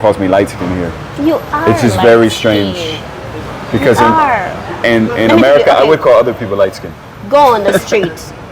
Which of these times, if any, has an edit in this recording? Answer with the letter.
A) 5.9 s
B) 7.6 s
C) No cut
C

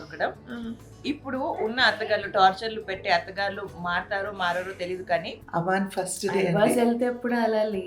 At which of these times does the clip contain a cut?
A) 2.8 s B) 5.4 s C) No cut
B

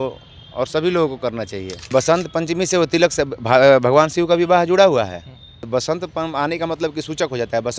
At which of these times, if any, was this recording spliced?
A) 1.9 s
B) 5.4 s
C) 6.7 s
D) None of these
A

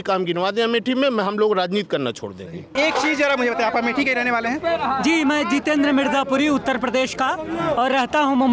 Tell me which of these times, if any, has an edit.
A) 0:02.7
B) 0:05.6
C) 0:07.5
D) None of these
D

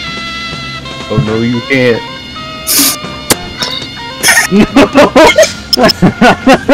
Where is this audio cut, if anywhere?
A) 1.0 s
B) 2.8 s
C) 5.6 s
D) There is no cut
C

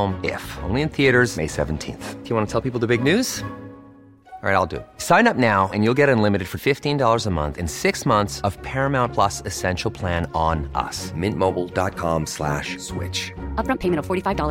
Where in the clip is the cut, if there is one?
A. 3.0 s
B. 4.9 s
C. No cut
C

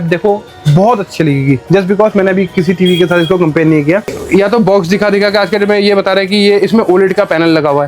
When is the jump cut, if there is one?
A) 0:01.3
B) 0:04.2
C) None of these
B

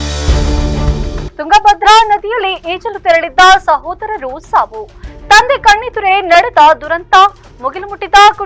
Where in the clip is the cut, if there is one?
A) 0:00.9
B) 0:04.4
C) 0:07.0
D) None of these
A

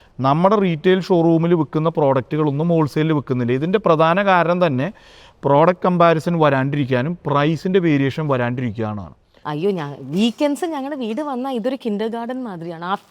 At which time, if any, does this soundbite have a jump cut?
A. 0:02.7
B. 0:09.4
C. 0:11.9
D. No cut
B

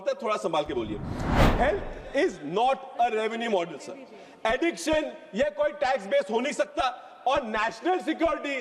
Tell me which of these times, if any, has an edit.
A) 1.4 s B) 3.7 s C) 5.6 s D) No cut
A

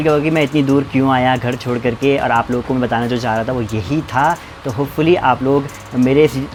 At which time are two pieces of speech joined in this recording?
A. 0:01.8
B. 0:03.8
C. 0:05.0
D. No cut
D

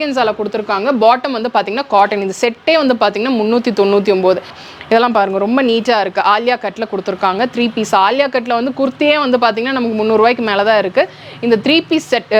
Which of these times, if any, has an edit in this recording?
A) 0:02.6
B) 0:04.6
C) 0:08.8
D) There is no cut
B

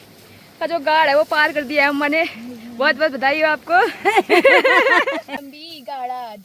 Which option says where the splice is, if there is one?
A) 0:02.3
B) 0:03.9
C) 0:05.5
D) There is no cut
C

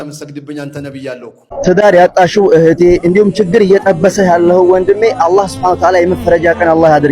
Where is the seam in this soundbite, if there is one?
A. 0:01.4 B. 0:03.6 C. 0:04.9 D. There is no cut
A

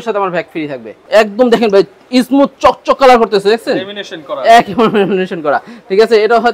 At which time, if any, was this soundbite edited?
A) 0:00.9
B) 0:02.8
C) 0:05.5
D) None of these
A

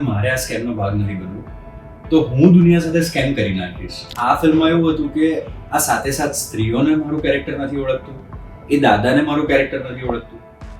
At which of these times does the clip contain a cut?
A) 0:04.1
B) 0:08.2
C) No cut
A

